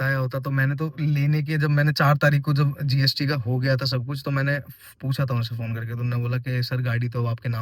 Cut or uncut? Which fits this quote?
uncut